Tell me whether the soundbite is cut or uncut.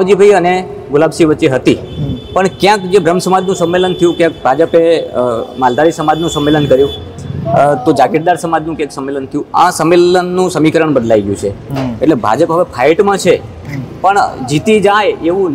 uncut